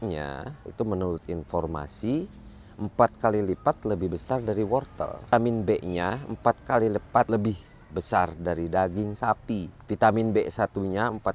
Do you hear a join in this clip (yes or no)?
yes